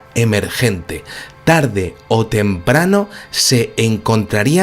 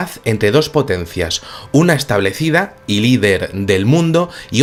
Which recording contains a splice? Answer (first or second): first